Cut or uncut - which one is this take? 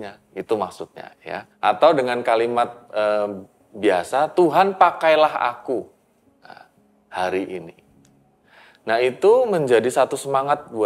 cut